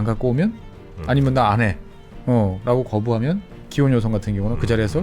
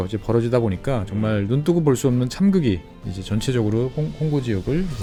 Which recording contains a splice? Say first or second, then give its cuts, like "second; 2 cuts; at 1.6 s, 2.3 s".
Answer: first; 1 cut; at 3.6 s